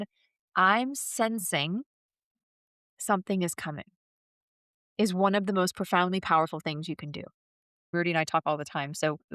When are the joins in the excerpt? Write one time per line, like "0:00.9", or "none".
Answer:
0:07.9